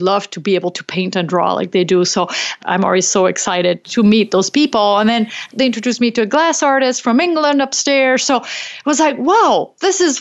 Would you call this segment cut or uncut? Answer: cut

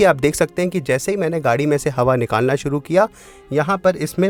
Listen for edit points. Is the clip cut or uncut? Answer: uncut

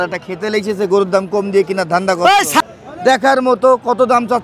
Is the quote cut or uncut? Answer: cut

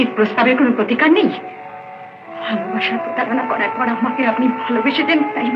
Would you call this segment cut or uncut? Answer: uncut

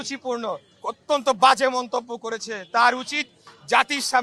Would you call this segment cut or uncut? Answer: uncut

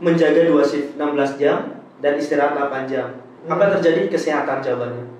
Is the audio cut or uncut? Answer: cut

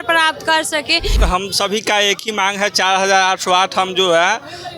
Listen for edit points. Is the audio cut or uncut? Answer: cut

